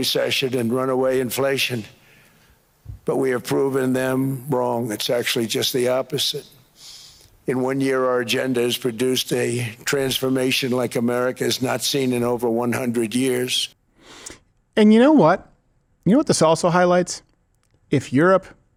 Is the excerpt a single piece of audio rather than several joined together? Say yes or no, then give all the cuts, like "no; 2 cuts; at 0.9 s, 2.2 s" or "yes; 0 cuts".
yes; 0 cuts